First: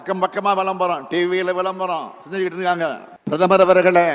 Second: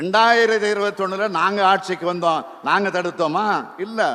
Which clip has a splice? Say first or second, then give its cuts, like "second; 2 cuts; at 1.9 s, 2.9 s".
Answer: first; 1 cut; at 3.1 s